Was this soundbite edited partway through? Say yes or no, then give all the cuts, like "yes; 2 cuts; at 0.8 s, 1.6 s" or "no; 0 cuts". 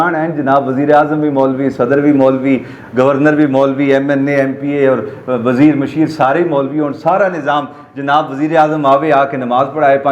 no; 0 cuts